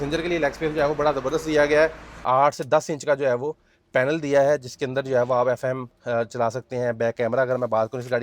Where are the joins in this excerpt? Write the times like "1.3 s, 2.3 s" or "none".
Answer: 2.1 s